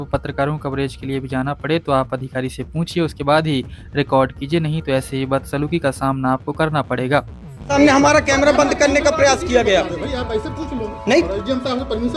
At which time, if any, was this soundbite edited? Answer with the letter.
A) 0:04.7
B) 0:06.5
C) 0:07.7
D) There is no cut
C